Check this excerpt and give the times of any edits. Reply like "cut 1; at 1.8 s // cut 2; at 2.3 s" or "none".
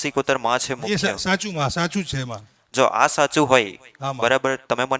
none